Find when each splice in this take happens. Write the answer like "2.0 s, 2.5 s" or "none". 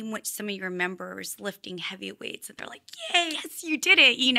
3.4 s

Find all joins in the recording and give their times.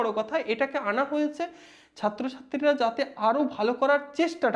none

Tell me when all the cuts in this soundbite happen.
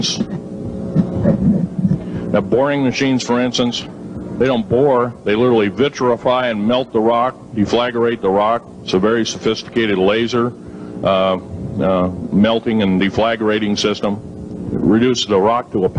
5.1 s

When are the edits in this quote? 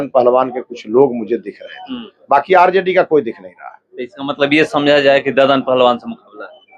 none

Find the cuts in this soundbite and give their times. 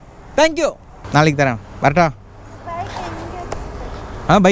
0.9 s

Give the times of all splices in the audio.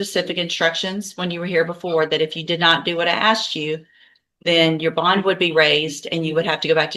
none

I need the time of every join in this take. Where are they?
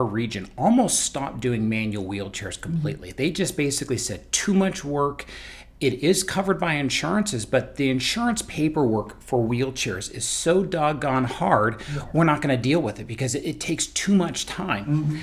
none

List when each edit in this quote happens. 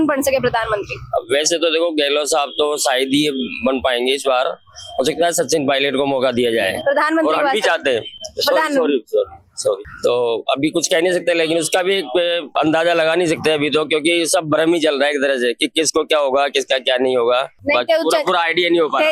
none

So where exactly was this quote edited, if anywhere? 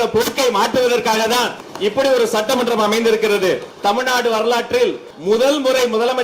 1.6 s, 3.7 s, 5.1 s

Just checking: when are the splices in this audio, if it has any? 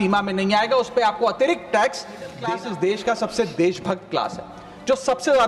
2.4 s

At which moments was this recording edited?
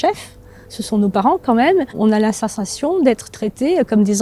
2.0 s

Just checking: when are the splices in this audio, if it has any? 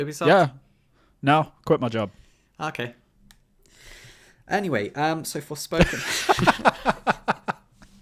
none

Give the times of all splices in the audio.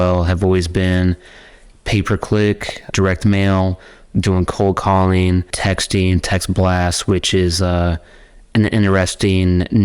2.9 s, 5.5 s

